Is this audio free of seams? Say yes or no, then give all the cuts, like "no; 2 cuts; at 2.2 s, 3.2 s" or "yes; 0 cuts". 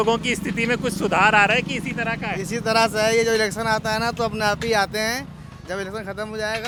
yes; 0 cuts